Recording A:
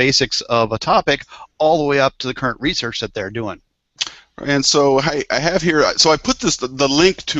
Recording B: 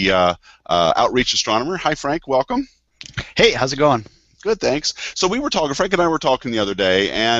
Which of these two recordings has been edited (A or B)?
A